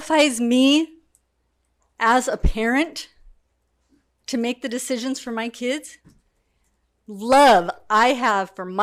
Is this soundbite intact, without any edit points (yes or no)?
yes